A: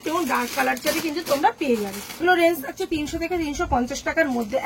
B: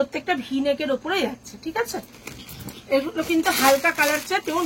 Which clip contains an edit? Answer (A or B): A